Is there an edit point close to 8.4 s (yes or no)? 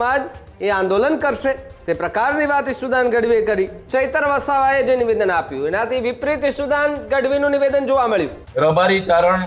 yes